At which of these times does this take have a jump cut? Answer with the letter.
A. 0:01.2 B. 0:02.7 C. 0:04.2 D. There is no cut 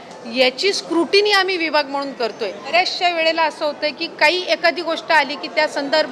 B